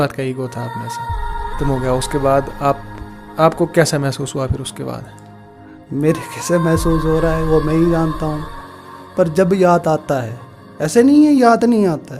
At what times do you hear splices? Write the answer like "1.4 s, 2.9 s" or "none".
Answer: 1.6 s